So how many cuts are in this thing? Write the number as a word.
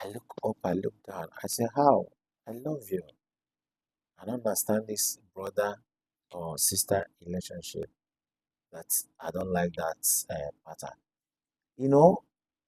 zero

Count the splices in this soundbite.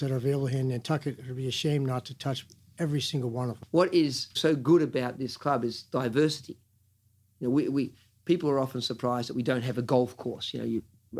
two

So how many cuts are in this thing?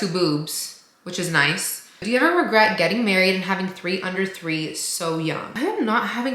two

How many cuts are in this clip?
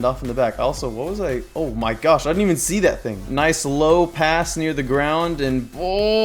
one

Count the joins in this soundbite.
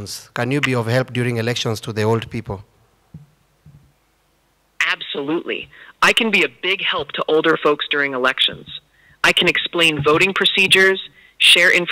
zero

